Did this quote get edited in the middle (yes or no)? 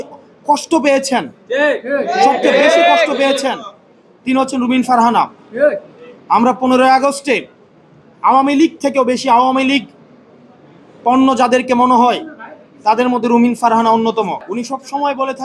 yes